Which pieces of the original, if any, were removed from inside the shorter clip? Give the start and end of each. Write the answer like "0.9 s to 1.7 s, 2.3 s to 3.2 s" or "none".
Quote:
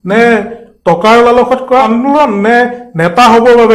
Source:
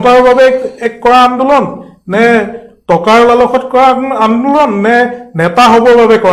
3.9 s to 4.2 s